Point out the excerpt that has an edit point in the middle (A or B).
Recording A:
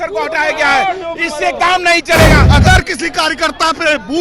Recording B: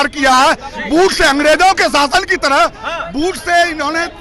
A